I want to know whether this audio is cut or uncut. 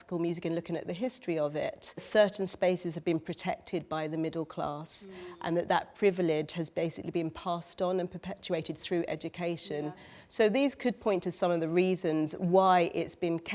cut